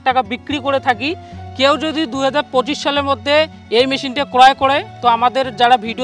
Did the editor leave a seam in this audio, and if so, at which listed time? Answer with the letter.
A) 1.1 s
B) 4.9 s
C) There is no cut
C